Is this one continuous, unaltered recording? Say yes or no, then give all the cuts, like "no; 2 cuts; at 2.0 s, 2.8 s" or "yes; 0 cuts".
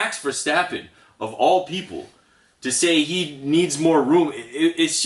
yes; 0 cuts